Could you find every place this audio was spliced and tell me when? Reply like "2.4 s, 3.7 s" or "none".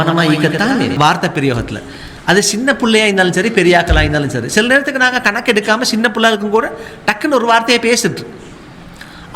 0.9 s